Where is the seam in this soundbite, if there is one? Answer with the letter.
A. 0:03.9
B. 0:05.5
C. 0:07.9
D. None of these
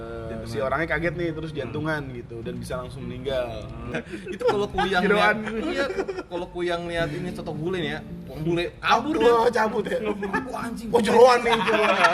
A